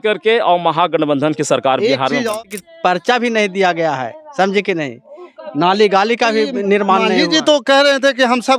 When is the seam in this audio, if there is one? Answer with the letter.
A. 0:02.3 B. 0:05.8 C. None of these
A